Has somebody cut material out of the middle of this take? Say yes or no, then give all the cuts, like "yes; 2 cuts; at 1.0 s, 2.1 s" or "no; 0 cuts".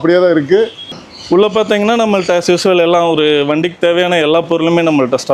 yes; 1 cut; at 1.0 s